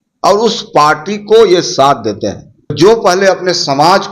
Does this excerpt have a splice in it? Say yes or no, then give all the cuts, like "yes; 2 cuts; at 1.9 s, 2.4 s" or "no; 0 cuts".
yes; 1 cut; at 2.7 s